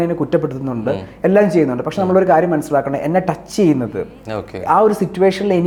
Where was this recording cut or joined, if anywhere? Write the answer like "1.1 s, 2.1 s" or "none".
none